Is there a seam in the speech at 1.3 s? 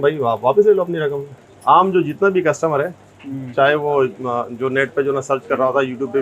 yes; 1 cut; at 1.3 s

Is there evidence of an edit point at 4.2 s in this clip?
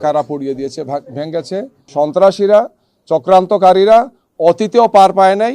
no; 1 cut; at 1.8 s

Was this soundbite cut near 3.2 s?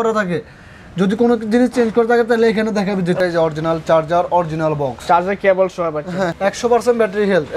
yes; 2 cuts; at 3.2 s, 6.4 s

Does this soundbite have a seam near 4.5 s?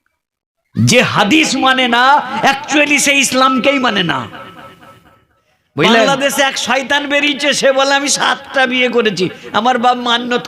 no; 1 cut; at 6.1 s

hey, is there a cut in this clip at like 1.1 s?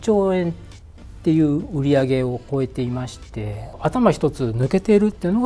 no; 1 cut; at 3.6 s

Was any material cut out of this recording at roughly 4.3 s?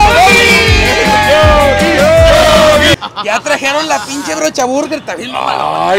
no; 1 cut; at 3.1 s

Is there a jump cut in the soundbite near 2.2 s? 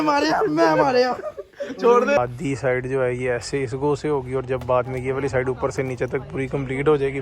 yes; 1 cut; at 2.2 s

